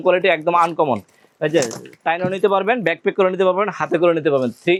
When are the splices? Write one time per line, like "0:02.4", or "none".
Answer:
none

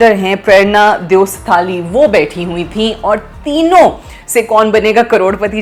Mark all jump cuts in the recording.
none

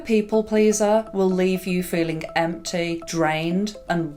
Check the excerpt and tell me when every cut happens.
none

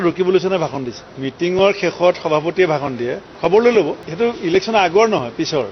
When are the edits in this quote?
0:04.0

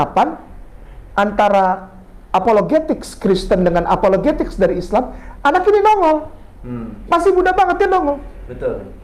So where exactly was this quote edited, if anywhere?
none

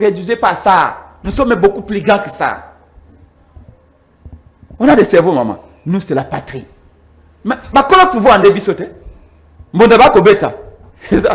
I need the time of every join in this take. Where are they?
none

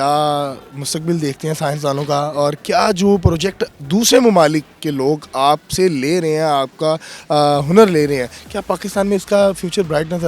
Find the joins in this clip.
none

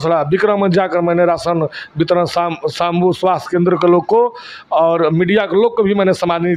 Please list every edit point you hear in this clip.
none

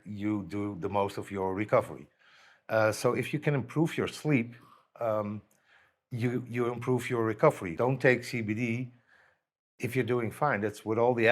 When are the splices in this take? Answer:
0:07.7

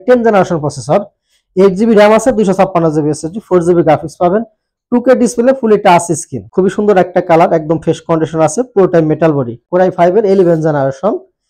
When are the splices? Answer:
0:09.5

